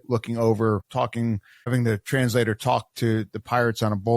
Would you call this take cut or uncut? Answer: cut